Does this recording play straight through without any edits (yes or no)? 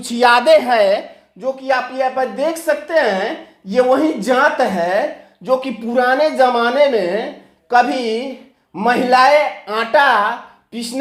yes